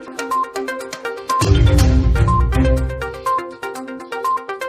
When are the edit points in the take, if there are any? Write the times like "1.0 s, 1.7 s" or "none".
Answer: 3.5 s